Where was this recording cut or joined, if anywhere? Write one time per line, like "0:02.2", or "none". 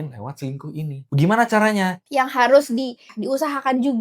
0:01.0
0:02.0
0:03.1